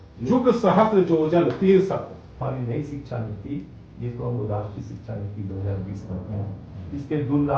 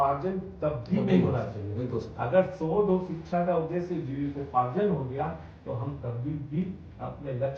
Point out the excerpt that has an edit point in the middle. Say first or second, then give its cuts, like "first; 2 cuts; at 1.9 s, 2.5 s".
first; 1 cut; at 2.4 s